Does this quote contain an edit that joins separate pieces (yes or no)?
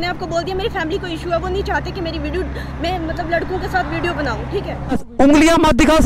yes